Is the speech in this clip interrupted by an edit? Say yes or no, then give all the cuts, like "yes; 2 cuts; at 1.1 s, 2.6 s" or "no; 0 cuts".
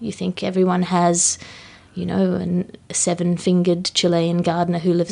no; 0 cuts